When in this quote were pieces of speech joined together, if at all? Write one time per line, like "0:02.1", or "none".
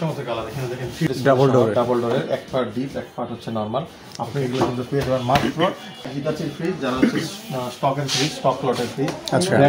0:01.1
0:06.1